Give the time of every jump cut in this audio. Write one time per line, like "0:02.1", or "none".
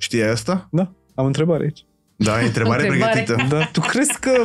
none